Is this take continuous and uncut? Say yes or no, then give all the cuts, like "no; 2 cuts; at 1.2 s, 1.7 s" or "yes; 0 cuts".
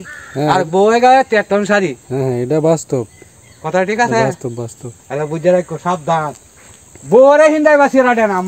yes; 0 cuts